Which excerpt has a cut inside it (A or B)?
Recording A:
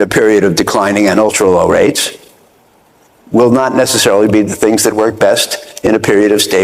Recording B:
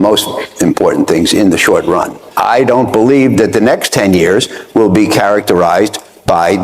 B